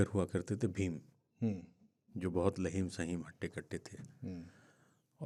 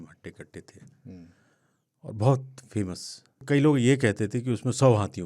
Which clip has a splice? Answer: second; 1 cut; at 3.4 s

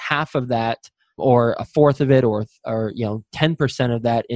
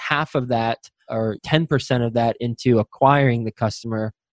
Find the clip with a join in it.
second; 1 cut; at 1.2 s

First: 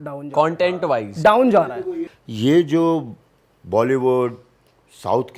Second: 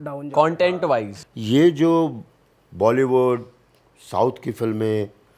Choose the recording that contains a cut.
second; 1 cut; at 1.1 s

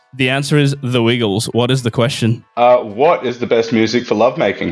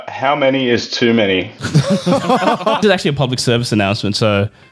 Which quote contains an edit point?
second; 1 cut; at 2.8 s

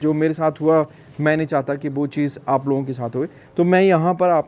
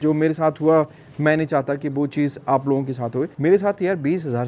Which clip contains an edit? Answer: second; 1 cut; at 3.3 s

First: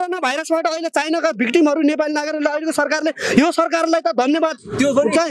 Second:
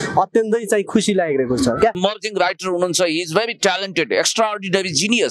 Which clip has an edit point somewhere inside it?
second; 1 cut; at 2.0 s

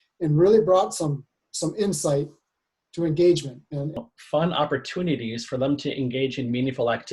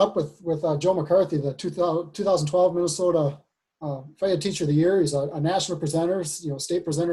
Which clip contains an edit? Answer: first; 1 cut; at 3.9 s

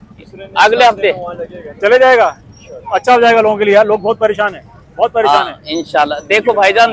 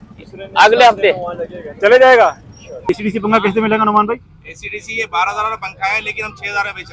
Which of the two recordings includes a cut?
second; 1 cut; at 2.9 s

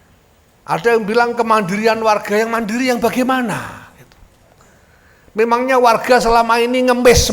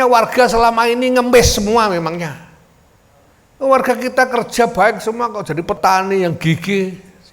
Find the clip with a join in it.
second; 1 cut; at 5.8 s

